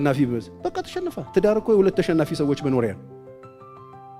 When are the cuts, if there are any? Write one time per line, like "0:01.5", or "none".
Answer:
none